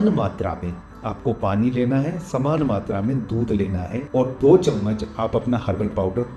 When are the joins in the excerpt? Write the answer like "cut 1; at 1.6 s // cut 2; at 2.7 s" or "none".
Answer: none

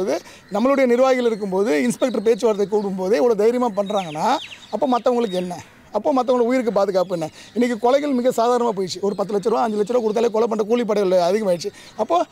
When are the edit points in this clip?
none

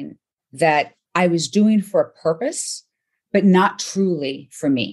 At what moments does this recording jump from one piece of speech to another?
cut 1; at 1.0 s

